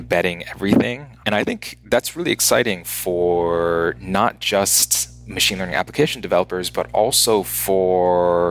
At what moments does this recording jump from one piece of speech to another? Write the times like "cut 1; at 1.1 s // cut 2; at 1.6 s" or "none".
cut 1; at 1.1 s